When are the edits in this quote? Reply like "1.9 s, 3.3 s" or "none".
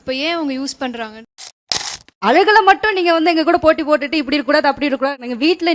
1.6 s